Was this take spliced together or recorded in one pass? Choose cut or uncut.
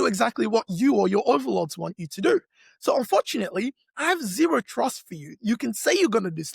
uncut